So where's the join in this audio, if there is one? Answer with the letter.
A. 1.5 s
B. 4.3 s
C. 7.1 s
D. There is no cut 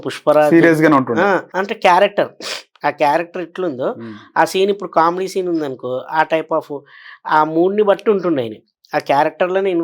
A